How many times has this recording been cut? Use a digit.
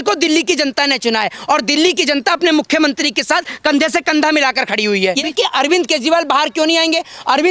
1